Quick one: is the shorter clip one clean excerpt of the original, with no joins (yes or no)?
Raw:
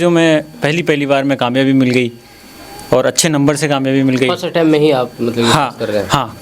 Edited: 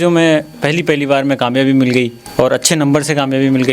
no